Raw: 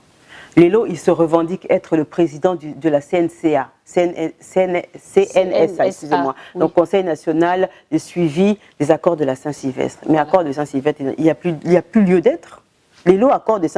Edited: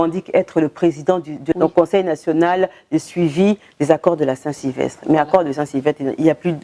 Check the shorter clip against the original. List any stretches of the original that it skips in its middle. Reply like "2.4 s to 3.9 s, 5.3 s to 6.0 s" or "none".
2.9 s to 6.5 s